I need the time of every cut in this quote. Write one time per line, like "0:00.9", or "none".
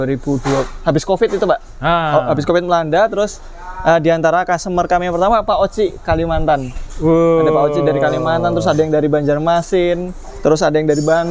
none